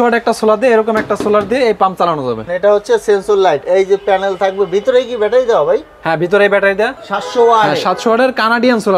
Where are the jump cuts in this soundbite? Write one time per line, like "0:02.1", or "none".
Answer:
0:02.4
0:07.0